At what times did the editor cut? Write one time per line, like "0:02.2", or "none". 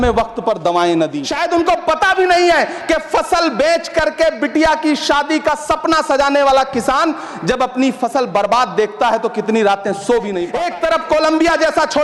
0:01.3
0:10.5